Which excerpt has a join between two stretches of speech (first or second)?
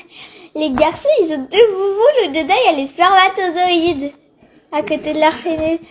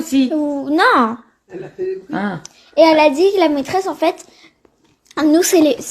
second